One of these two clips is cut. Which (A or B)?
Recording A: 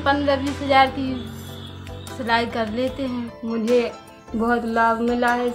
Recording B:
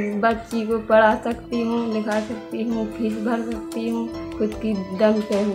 A